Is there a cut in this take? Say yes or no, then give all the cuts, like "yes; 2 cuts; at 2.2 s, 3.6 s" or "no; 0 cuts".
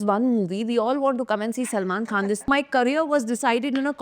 yes; 1 cut; at 2.5 s